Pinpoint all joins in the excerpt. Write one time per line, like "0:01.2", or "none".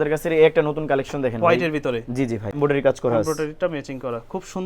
0:02.6